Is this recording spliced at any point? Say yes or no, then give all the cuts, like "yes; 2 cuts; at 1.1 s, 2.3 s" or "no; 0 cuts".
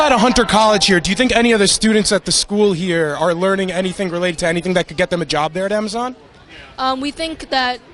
no; 0 cuts